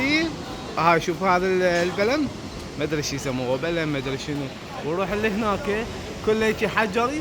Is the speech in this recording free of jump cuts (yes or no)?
yes